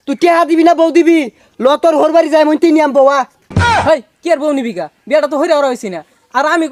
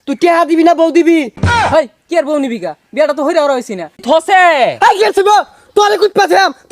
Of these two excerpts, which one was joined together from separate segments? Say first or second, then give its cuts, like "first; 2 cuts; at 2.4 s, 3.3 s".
second; 2 cuts; at 1.4 s, 4.0 s